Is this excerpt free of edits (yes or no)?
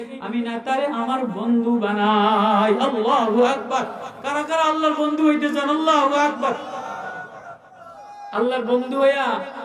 yes